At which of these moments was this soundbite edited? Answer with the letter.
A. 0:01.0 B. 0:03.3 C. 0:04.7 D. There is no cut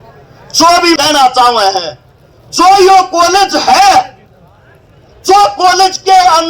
A